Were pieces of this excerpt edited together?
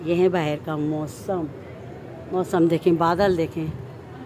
no; 0 cuts

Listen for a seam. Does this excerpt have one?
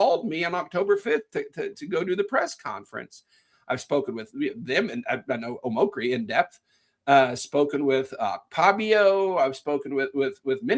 no; 0 cuts

